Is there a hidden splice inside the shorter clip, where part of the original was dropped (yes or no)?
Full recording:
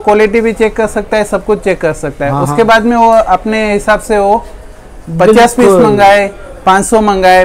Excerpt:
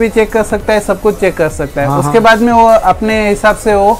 no